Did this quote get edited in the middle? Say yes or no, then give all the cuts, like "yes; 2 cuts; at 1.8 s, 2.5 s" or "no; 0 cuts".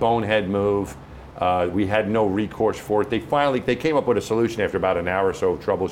no; 0 cuts